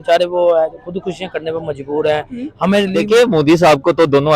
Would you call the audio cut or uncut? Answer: cut